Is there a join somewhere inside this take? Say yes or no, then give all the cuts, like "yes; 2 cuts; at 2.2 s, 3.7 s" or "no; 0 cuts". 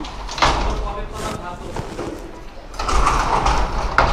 no; 0 cuts